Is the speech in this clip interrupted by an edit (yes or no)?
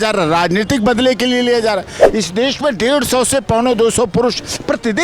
yes